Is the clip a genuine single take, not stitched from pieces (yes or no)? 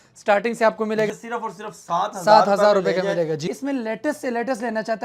no